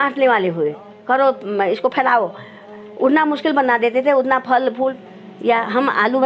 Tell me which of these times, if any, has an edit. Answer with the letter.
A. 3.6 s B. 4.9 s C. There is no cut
B